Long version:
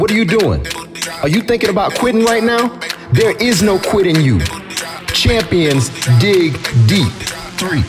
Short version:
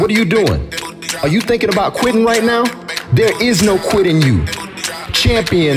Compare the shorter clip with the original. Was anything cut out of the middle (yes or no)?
no